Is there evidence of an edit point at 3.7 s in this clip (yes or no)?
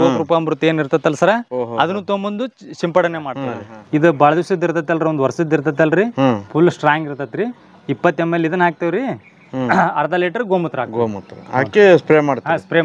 yes